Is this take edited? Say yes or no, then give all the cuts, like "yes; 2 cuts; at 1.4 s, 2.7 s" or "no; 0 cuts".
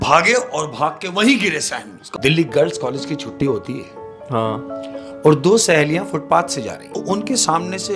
yes; 2 cuts; at 2.1 s, 7.0 s